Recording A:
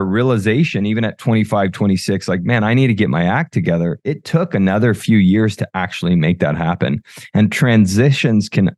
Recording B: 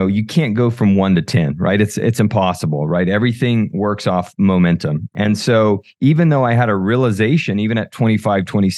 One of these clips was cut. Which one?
B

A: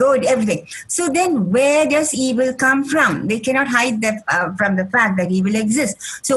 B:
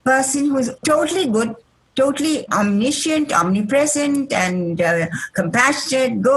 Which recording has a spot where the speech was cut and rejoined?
B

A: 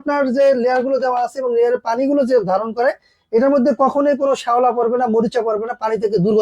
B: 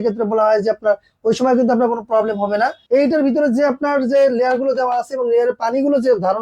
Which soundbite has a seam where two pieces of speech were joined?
B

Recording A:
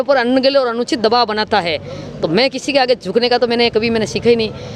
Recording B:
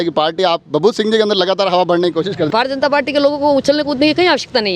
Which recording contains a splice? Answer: B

